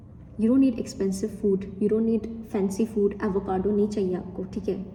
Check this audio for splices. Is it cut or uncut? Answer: uncut